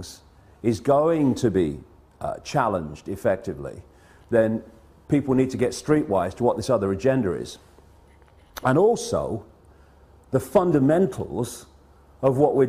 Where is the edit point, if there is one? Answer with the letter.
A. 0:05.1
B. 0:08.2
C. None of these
C